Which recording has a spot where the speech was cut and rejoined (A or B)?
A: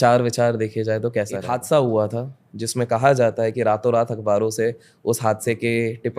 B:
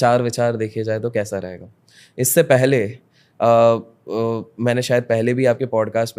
A